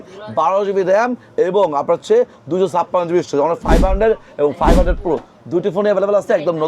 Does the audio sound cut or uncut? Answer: uncut